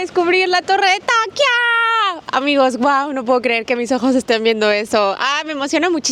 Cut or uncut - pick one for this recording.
uncut